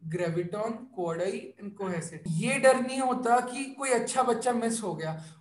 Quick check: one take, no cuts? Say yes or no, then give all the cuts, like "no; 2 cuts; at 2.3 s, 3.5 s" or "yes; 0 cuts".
no; 1 cut; at 2.2 s